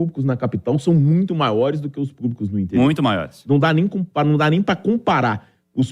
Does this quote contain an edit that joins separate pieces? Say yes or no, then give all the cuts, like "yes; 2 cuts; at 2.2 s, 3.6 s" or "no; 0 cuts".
no; 0 cuts